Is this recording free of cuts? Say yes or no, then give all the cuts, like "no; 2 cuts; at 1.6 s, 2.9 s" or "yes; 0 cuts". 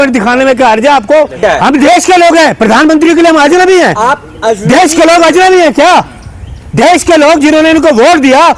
no; 1 cut; at 1.4 s